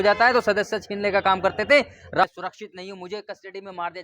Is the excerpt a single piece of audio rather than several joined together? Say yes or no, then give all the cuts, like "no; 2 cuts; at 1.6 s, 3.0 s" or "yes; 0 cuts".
no; 1 cut; at 2.2 s